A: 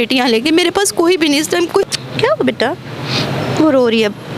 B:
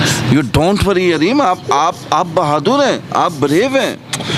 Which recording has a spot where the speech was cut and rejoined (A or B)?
A